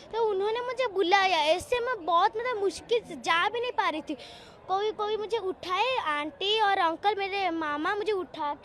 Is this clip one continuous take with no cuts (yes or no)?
yes